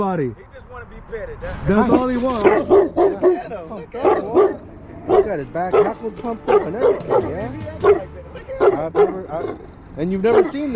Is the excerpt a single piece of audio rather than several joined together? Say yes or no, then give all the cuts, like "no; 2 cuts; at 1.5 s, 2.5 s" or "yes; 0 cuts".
no; 1 cut; at 2.4 s